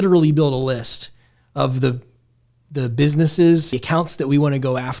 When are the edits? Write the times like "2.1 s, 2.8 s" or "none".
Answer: 3.7 s